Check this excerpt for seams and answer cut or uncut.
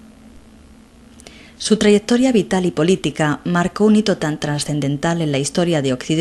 uncut